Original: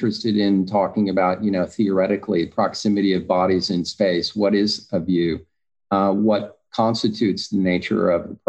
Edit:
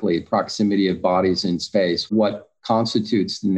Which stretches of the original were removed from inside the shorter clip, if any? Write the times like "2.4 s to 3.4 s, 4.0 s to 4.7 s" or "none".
4.4 s to 6.2 s